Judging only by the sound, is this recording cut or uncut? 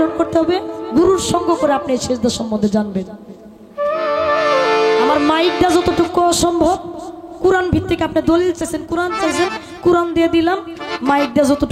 uncut